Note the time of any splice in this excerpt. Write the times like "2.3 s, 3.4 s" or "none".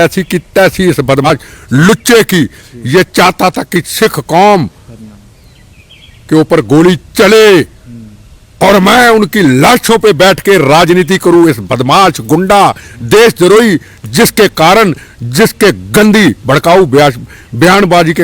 1.3 s